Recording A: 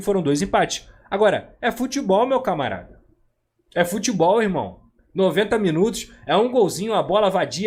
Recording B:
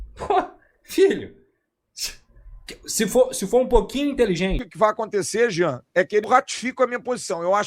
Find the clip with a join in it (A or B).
B